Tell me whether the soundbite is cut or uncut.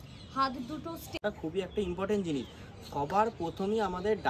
cut